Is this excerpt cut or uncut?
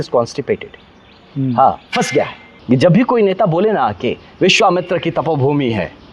cut